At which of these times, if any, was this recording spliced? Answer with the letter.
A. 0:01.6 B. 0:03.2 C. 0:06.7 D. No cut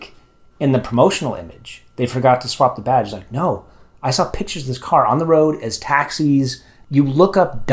C